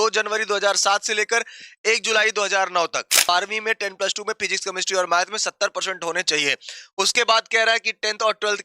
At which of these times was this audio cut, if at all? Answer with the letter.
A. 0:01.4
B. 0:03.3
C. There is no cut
B